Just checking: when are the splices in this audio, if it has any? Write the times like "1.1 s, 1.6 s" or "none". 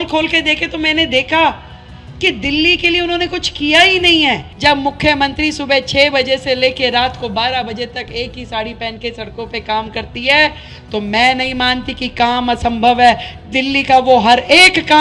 4.5 s